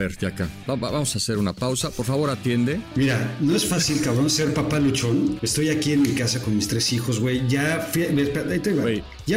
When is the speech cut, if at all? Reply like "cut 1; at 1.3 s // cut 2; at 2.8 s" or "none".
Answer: cut 1; at 2.9 s // cut 2; at 5.4 s